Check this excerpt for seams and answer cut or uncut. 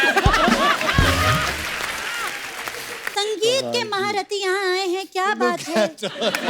cut